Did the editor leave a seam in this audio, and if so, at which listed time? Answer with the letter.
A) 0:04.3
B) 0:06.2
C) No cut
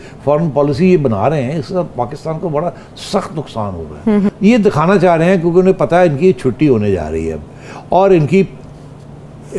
A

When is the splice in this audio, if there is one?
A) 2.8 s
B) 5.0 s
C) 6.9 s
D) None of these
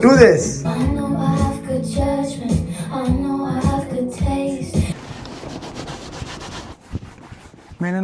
B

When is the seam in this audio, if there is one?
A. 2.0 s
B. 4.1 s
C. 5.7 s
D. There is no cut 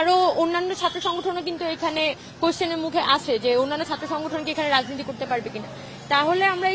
D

